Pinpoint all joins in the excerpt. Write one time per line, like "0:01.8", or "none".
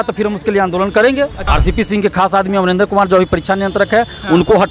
0:01.4